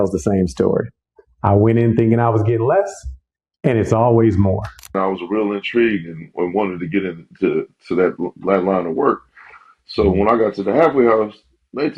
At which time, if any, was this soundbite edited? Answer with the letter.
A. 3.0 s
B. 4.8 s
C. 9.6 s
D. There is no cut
B